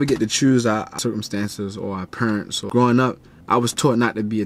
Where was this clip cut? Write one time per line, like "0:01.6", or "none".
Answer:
0:00.9
0:02.6
0:03.3